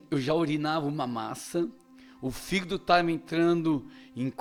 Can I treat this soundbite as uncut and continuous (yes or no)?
yes